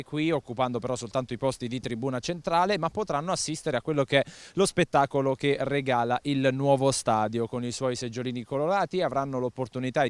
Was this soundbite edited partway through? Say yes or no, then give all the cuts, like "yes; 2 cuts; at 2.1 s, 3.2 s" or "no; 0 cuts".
yes; 1 cut; at 6.0 s